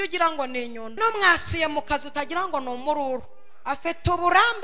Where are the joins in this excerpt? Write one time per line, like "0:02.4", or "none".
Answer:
0:01.0